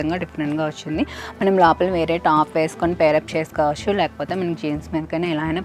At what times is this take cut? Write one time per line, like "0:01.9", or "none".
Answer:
none